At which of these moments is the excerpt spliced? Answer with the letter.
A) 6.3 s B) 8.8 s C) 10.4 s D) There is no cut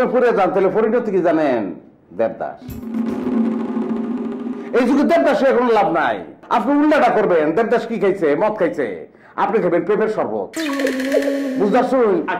A